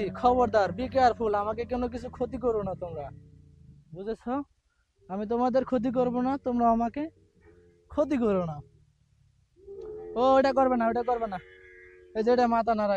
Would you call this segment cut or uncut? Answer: uncut